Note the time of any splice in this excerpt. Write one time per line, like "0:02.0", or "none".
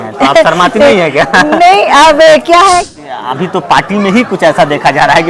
0:02.9

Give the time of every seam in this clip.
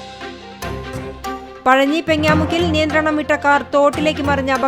0:01.0

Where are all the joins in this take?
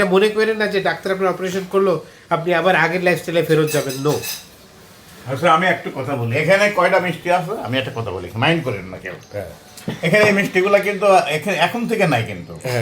none

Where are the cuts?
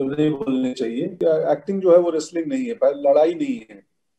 0:01.2

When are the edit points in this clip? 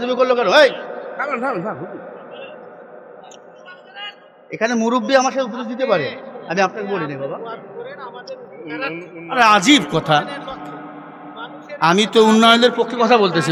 none

